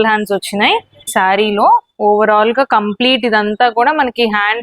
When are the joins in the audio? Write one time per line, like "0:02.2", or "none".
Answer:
0:01.1